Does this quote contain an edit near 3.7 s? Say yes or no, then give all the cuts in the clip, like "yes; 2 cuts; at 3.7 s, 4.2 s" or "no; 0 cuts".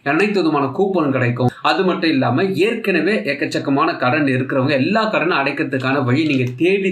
no; 1 cut; at 1.5 s